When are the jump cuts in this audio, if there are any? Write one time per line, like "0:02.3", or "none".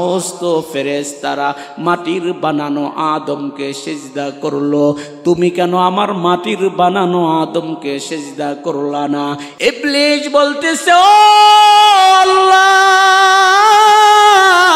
0:09.5